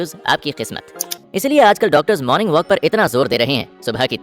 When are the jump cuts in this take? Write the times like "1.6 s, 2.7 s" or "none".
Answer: 1.1 s